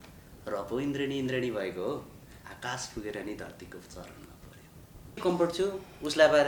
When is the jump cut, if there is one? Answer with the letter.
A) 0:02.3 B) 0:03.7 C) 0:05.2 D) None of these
C